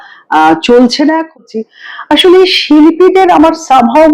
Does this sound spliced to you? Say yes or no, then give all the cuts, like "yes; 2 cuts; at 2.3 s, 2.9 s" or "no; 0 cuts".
yes; 1 cut; at 1.4 s